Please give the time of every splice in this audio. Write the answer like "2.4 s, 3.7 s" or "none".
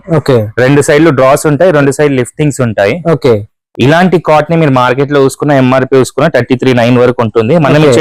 none